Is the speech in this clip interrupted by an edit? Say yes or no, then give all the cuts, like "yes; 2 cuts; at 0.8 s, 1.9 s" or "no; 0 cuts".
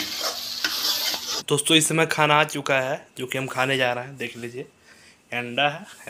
yes; 1 cut; at 1.3 s